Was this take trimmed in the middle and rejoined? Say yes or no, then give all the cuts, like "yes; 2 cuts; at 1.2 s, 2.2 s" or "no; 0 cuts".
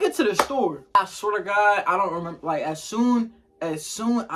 yes; 1 cut; at 1.0 s